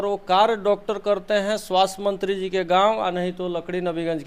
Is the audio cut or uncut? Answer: uncut